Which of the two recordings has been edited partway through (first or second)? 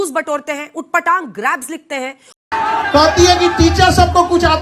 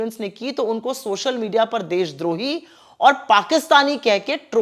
first